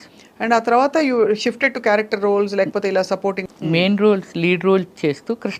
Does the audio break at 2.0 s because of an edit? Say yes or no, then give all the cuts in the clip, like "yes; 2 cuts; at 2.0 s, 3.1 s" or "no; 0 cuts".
no; 1 cut; at 3.4 s